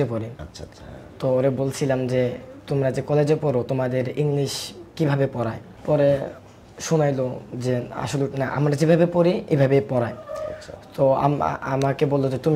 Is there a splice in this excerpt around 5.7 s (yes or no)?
yes